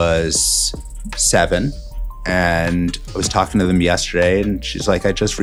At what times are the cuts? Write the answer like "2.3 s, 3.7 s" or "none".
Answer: none